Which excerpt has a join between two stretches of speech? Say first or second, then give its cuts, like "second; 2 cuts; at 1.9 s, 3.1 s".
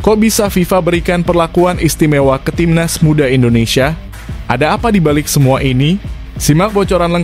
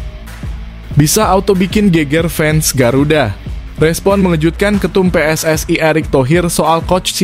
second; 1 cut; at 1.0 s